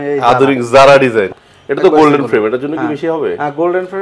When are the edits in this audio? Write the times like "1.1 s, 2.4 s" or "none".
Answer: 1.4 s